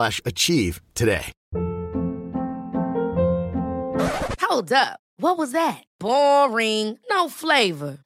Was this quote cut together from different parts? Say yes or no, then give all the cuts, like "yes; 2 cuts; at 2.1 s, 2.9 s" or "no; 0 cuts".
yes; 1 cut; at 1.4 s